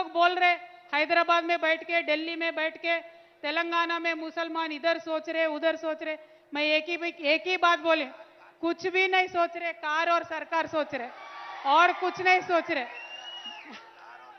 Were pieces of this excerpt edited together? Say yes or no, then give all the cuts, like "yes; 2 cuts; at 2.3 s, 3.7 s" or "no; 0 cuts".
no; 0 cuts